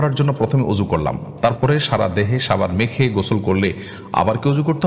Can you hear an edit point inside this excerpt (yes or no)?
no